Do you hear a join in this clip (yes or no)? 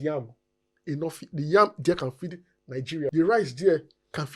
yes